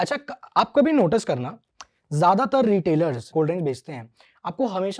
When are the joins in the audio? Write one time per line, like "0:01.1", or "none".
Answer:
0:03.3